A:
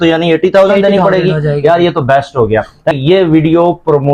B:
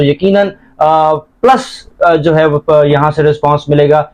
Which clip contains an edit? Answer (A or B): A